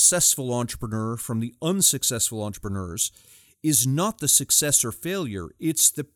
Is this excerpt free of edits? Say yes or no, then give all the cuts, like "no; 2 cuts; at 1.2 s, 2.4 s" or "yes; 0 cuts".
yes; 0 cuts